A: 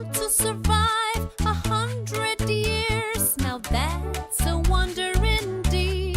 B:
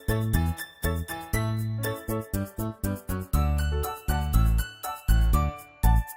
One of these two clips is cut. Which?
B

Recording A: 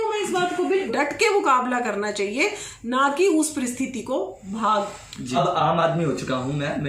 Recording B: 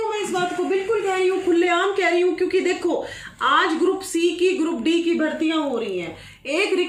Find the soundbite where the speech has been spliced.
A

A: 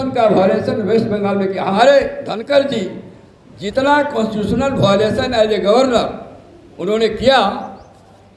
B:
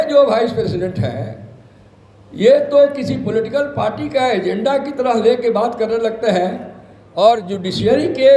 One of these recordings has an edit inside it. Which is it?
A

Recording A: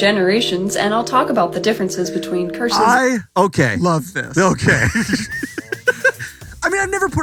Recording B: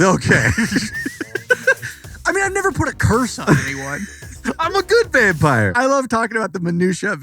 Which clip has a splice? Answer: B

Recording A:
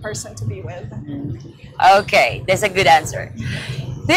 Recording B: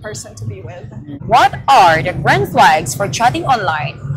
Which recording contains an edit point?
B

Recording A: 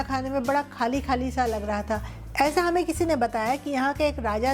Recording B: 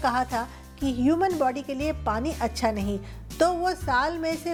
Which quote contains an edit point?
A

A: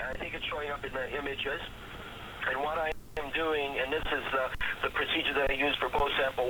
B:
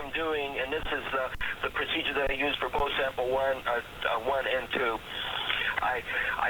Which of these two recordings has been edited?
B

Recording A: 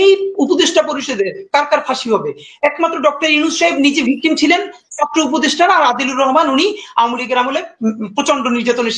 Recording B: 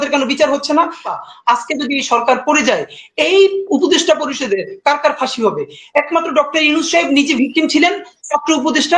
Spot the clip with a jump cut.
B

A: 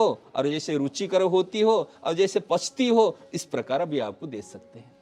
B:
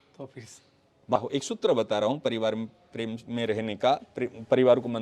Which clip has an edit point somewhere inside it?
B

